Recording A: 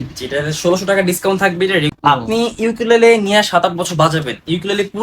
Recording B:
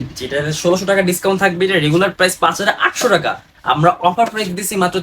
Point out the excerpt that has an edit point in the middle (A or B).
A